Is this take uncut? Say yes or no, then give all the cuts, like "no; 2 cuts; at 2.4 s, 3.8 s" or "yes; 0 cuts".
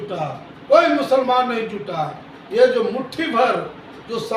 yes; 0 cuts